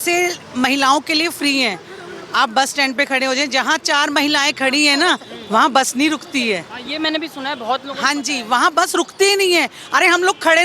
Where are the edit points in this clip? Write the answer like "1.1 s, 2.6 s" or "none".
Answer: none